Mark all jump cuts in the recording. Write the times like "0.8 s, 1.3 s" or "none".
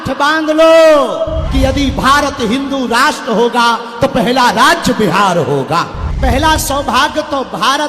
1.4 s, 6.0 s